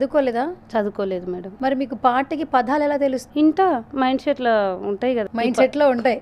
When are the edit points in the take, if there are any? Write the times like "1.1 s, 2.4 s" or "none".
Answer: 1.5 s, 3.2 s, 5.2 s